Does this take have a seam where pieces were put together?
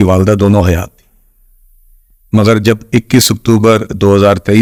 no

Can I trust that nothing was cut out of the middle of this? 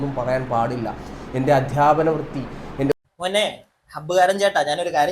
no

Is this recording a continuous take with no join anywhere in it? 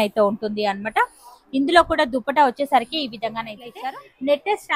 no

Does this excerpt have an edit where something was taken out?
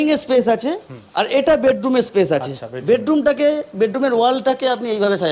no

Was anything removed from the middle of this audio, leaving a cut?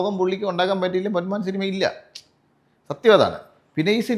no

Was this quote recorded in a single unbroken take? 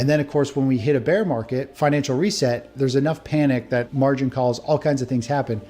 no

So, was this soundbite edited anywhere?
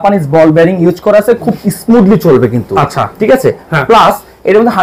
no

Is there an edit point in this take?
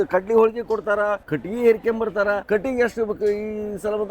yes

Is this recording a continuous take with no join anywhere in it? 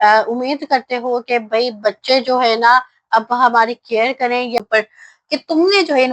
no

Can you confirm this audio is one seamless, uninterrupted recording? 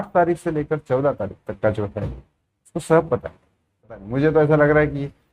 no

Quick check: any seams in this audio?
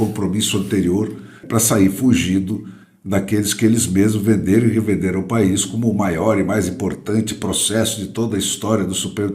yes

